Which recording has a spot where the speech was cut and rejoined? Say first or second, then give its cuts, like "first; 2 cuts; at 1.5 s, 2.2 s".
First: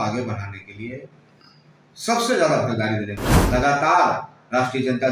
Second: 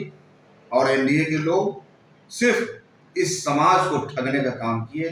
first; 1 cut; at 3.3 s